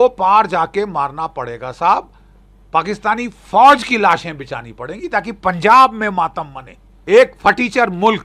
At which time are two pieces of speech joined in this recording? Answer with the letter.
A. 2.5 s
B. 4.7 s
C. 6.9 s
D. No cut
C